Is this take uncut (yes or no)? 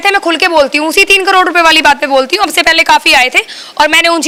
yes